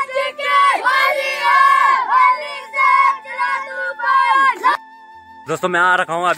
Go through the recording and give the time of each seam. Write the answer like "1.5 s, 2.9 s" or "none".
4.7 s